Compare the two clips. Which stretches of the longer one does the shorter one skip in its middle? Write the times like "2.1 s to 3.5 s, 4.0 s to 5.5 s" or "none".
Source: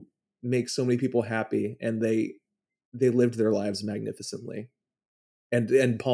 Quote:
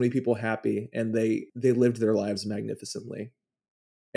2.4 s to 2.9 s